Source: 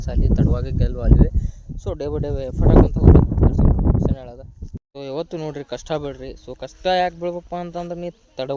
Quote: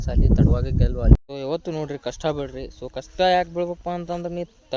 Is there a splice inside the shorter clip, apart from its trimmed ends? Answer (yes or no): yes